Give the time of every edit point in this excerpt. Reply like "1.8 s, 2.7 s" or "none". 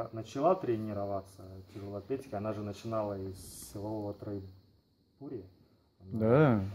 none